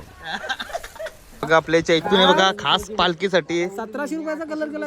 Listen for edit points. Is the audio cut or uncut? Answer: cut